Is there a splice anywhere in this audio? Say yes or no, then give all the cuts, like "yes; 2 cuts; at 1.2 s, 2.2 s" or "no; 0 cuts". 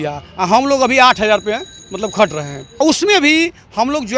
yes; 1 cut; at 2.7 s